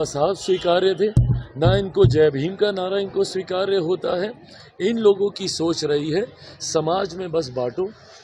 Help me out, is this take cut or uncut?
uncut